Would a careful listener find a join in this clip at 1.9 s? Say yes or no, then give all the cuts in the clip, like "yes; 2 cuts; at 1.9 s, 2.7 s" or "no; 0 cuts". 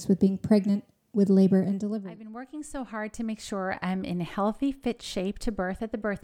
yes; 1 cut; at 1.9 s